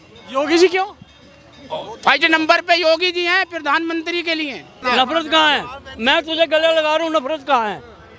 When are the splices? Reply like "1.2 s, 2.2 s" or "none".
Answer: 4.8 s